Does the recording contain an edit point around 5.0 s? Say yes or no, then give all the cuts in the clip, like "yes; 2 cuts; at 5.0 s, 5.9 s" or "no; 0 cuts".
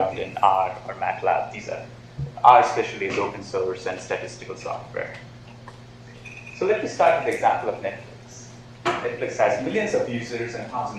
no; 0 cuts